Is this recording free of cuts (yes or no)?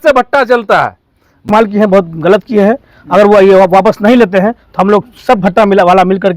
no